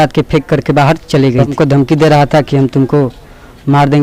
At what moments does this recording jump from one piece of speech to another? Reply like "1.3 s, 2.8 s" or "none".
1.5 s